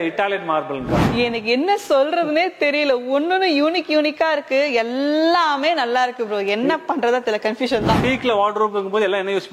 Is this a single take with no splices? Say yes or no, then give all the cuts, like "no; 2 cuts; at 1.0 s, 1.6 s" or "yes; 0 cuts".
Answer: no; 2 cuts; at 1.0 s, 8.0 s